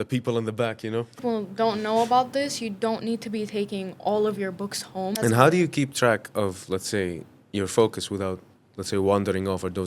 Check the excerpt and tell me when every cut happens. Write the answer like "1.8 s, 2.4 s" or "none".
1.1 s, 5.1 s